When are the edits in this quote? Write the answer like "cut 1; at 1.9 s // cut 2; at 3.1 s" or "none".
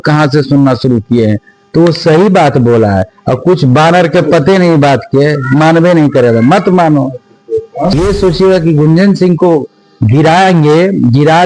cut 1; at 7.8 s